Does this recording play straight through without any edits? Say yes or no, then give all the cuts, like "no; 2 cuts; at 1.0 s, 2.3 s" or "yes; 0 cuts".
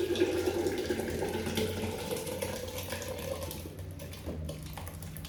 yes; 0 cuts